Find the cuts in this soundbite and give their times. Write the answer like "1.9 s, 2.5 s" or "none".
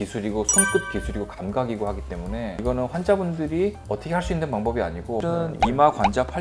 5.2 s